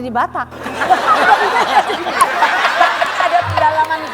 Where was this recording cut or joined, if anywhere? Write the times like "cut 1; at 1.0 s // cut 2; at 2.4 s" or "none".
none